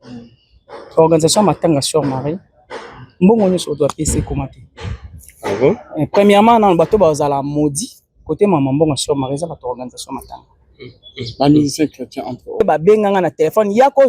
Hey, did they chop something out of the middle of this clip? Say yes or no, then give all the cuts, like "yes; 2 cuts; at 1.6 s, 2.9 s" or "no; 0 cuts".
yes; 1 cut; at 12.6 s